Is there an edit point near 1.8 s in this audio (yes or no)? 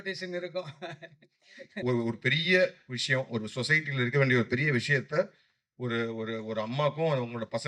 yes